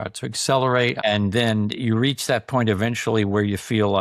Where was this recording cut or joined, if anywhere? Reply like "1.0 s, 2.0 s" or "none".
1.0 s